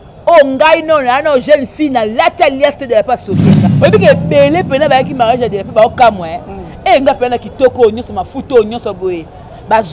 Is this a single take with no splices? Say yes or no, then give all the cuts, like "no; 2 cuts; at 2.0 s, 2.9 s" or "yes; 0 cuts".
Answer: no; 1 cut; at 3.7 s